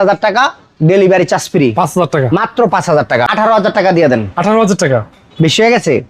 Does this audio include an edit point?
yes; 1 cut; at 3.3 s

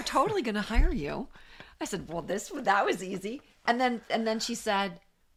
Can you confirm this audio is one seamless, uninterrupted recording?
yes; 0 cuts

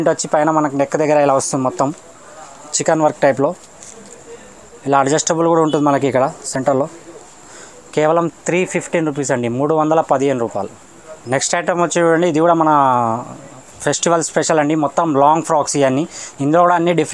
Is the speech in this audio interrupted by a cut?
no; 0 cuts

